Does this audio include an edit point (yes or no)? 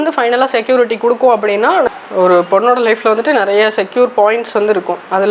yes